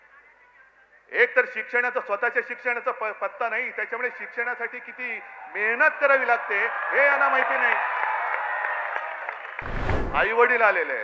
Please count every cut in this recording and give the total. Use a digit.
1